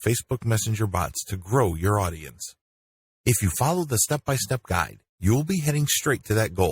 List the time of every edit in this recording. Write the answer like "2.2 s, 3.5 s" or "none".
none